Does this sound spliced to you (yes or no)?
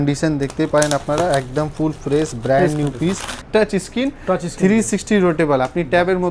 yes